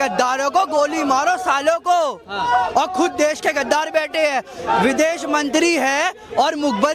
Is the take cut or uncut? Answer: uncut